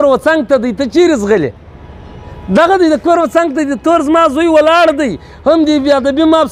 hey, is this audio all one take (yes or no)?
yes